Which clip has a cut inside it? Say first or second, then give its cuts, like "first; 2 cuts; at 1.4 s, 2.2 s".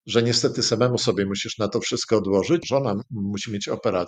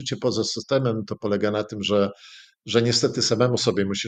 first; 1 cut; at 2.6 s